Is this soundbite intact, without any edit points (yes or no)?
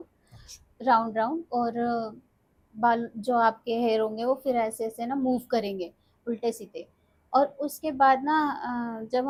yes